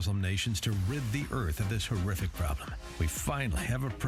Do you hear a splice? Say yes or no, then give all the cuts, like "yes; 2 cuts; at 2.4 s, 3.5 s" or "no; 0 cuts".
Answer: no; 0 cuts